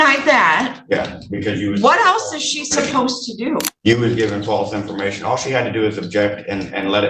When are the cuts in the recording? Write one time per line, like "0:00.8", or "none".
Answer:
none